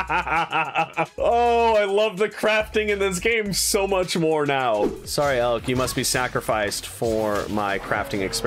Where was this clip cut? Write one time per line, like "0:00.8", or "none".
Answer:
0:01.1
0:05.0